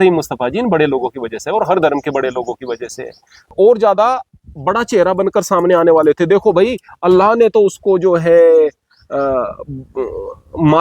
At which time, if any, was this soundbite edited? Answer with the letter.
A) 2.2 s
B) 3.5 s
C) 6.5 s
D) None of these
B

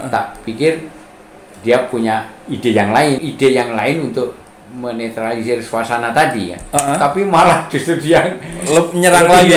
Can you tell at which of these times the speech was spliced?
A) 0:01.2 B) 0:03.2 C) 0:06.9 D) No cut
B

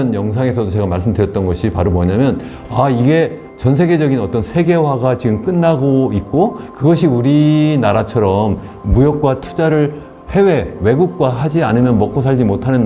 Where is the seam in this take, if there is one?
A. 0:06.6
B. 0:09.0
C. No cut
C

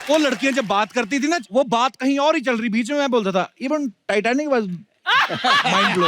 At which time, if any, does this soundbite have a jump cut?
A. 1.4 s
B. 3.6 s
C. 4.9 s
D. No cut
A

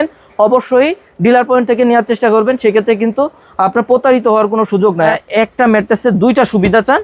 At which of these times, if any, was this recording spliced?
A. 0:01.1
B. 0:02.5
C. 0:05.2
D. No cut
C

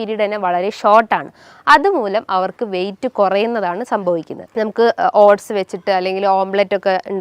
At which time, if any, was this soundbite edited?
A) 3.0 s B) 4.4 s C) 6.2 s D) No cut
B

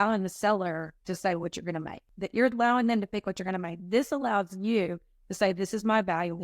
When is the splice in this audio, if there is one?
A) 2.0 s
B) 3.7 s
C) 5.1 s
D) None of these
A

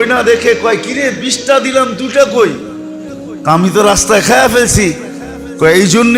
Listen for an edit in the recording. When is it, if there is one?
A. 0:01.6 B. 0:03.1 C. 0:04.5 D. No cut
D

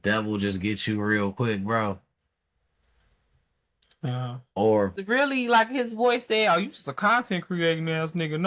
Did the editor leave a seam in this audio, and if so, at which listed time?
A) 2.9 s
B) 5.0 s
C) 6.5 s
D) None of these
B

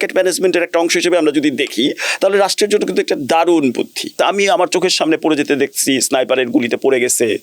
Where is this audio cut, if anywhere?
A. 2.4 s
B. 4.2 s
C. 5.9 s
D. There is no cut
B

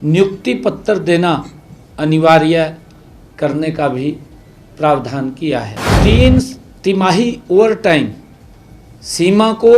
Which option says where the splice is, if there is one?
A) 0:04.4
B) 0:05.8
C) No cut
B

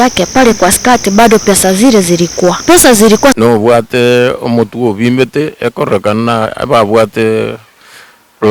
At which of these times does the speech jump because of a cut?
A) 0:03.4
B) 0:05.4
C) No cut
A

